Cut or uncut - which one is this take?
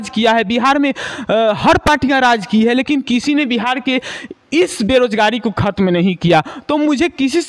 uncut